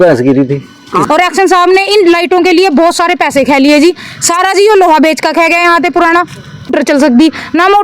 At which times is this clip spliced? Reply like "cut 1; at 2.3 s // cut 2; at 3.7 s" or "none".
cut 1; at 1.1 s // cut 2; at 6.7 s